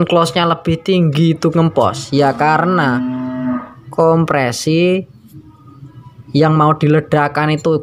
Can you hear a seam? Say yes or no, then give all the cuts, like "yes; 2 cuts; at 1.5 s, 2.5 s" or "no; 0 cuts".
no; 0 cuts